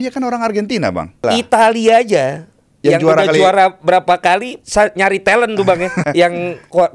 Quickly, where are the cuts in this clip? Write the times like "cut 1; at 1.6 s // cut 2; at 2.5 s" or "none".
cut 1; at 1.2 s // cut 2; at 4.6 s // cut 3; at 6.0 s

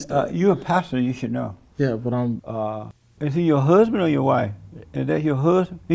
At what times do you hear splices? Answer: cut 1; at 2.5 s

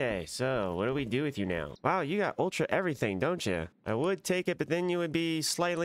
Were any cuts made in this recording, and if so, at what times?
none

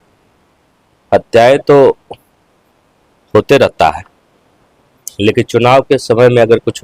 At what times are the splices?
none

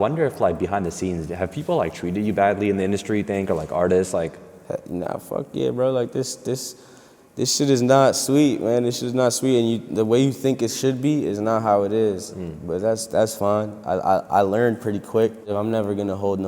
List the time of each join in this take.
none

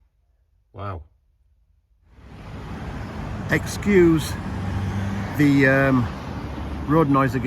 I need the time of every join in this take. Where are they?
cut 1; at 2.1 s

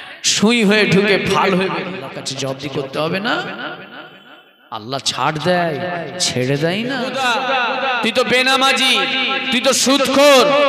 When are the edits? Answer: cut 1; at 2.2 s // cut 2; at 7.1 s

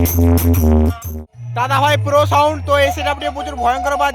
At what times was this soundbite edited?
cut 1; at 1.1 s

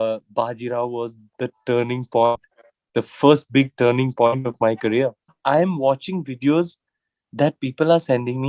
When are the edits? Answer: cut 1; at 5.3 s

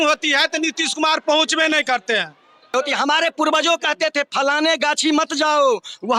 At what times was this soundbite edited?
cut 1; at 2.7 s

